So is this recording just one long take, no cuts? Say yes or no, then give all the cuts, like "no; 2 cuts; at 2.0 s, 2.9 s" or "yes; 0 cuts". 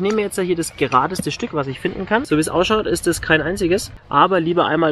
no; 2 cuts; at 2.2 s, 4.0 s